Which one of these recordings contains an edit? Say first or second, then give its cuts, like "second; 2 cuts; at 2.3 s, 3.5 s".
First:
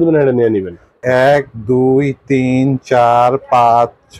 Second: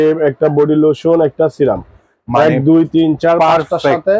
first; 1 cut; at 1.0 s